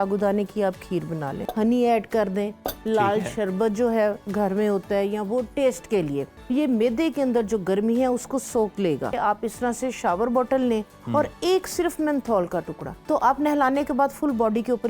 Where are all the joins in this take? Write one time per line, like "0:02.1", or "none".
0:01.4
0:06.3
0:09.1
0:12.9